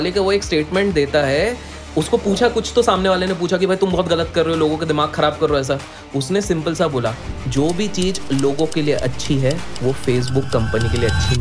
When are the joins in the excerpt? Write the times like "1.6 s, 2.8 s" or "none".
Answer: none